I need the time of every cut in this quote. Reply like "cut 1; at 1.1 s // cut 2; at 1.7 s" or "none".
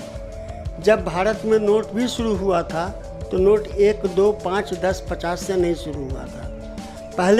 none